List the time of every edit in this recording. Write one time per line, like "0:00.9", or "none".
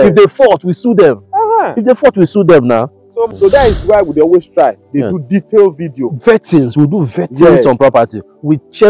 0:03.3